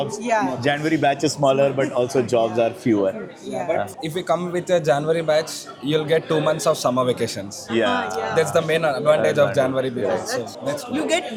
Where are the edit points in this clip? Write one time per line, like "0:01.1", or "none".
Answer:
none